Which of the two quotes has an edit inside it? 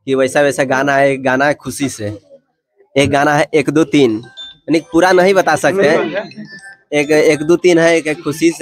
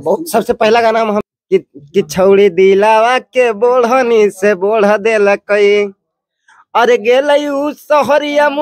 second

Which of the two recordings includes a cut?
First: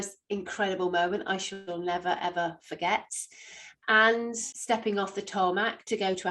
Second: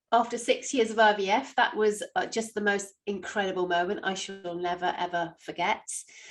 first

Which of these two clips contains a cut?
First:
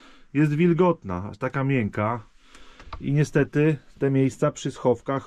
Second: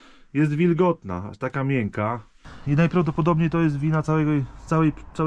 second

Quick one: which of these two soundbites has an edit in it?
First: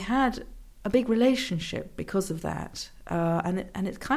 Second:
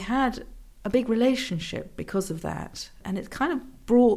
second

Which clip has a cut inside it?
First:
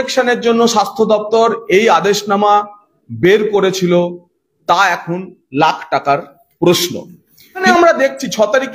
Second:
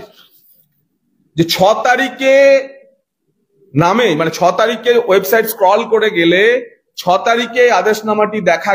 first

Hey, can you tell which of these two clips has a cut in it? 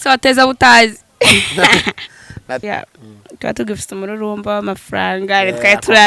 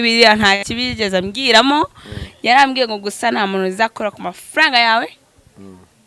first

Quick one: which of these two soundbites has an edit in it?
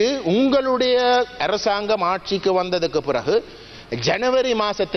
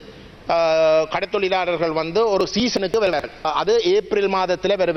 second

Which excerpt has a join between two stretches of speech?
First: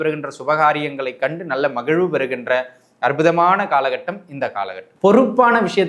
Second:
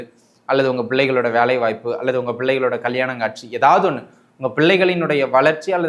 first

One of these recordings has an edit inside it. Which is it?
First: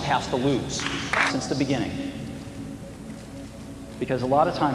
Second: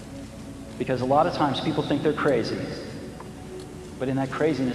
first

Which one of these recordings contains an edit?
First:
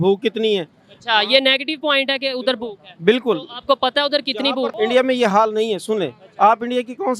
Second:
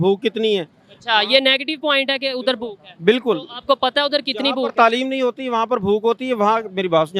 first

